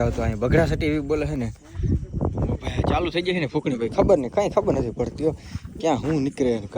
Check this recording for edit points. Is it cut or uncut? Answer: uncut